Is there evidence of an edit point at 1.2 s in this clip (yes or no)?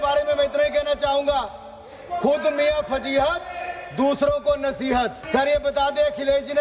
no